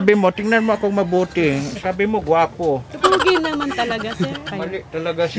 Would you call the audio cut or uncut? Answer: cut